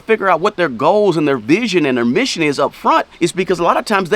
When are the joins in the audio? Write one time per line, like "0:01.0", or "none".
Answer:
0:03.1